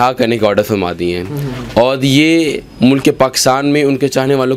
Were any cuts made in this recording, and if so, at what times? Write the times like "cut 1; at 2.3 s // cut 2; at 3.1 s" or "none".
none